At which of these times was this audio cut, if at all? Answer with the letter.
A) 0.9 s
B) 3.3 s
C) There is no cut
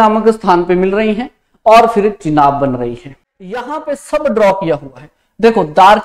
B